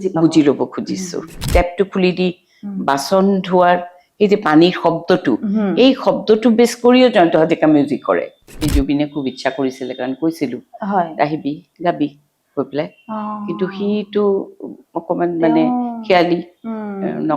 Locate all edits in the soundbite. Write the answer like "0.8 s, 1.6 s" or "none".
1.5 s, 8.6 s